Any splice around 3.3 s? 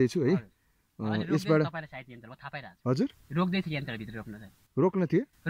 no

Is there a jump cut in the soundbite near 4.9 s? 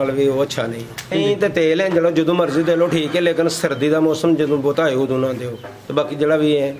no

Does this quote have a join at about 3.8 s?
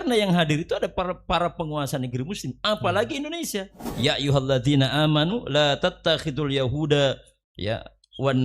yes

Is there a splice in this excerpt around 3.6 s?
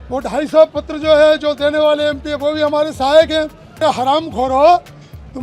yes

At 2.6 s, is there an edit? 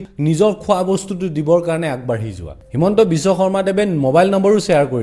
yes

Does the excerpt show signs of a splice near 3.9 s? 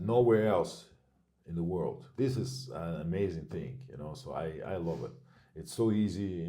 no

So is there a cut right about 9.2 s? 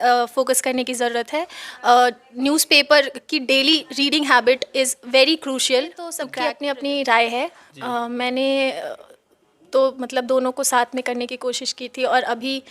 no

